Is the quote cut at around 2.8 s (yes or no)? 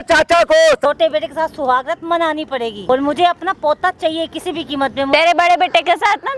yes